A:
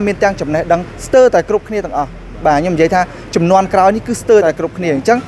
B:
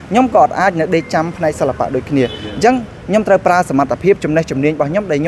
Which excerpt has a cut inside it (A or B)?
A